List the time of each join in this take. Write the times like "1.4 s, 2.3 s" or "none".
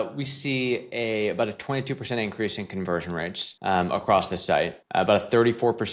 3.4 s, 4.8 s